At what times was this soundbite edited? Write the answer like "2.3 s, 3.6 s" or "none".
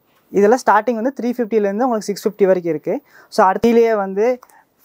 3.6 s